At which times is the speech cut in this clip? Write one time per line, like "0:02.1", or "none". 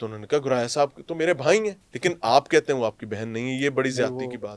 0:01.8